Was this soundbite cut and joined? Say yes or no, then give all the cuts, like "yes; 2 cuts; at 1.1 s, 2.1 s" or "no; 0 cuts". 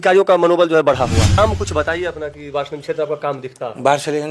yes; 1 cut; at 1.4 s